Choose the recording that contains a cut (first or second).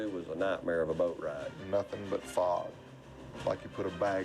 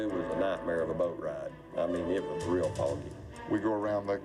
first